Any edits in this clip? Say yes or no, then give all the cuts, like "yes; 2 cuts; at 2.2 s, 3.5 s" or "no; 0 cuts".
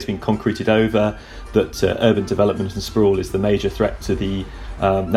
no; 0 cuts